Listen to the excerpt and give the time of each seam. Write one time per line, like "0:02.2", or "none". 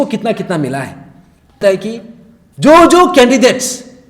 0:01.6